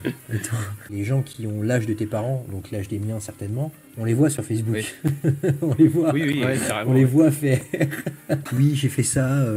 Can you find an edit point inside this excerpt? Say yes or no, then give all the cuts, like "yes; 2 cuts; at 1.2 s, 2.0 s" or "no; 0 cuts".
yes; 2 cuts; at 0.9 s, 8.5 s